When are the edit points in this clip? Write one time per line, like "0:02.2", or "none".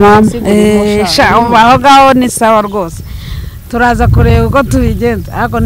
none